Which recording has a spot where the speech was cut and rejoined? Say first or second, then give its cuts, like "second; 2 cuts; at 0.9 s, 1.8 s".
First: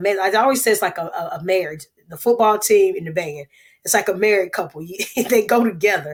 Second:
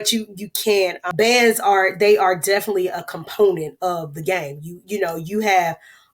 second; 1 cut; at 1.0 s